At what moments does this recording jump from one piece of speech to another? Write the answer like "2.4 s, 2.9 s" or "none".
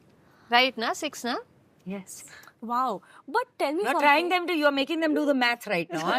none